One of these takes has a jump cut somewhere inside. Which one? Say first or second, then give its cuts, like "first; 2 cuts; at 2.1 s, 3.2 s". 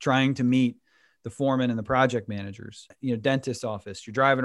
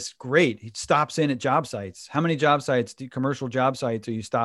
first; 1 cut; at 2.9 s